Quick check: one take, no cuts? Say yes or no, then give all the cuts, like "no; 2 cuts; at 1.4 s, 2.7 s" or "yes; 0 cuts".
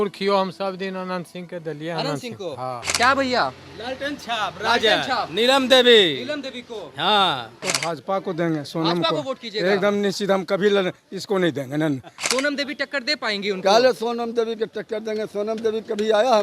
no; 3 cuts; at 2.9 s, 7.7 s, 12.1 s